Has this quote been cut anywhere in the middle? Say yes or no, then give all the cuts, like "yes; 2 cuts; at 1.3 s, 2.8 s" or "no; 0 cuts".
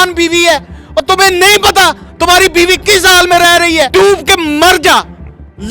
yes; 1 cut; at 3.9 s